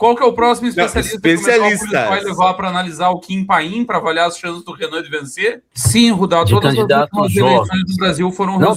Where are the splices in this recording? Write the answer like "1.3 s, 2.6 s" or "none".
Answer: 5.7 s